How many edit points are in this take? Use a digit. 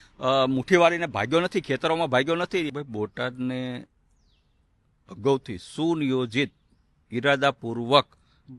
1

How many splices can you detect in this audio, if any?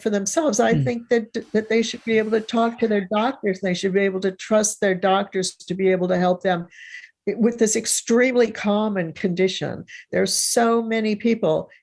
0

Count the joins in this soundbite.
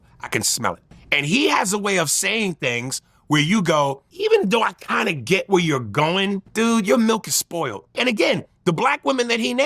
4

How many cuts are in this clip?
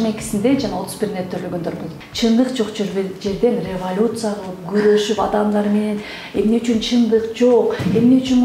1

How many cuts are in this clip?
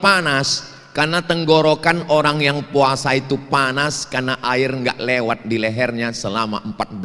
0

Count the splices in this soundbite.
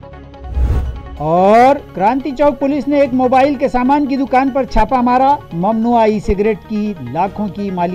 1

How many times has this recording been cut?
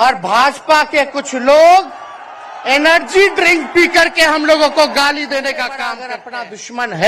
1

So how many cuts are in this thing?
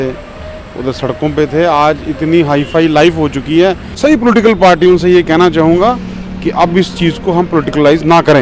1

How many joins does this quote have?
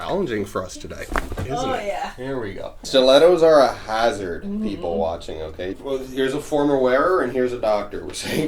2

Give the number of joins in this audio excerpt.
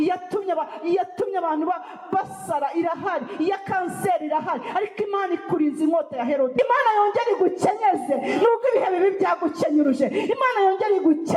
1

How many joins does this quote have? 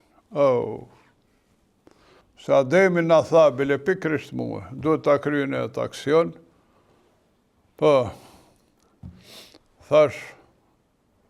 1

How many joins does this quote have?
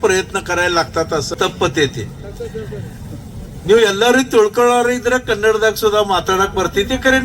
1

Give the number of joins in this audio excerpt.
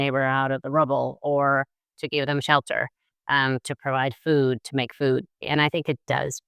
1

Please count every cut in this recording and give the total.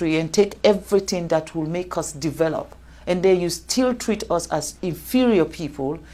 0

